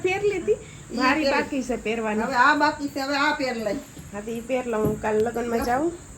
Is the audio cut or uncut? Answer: uncut